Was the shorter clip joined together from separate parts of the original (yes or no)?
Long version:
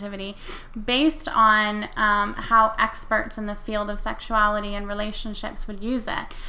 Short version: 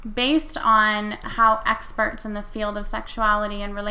yes